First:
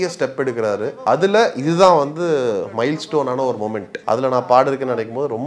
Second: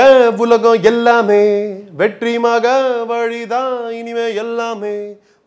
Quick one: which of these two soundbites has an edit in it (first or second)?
first